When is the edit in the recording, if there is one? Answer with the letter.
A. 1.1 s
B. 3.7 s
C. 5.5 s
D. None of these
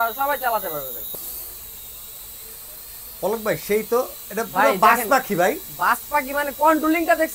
A